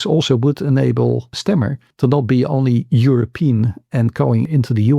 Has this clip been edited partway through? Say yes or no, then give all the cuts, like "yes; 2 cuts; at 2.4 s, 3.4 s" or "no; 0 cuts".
no; 0 cuts